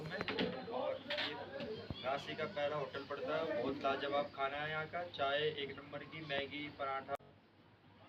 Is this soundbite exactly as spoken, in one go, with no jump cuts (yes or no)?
yes